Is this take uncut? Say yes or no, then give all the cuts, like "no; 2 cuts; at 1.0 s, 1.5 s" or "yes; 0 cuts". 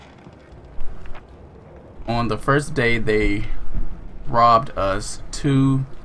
yes; 0 cuts